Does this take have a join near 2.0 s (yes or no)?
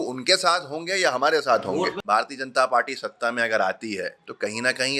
yes